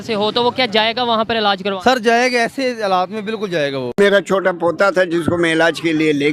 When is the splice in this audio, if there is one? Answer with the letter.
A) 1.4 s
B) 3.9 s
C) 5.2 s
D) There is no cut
B